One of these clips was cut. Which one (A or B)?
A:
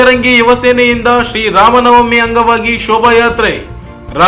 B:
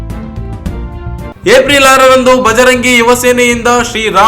B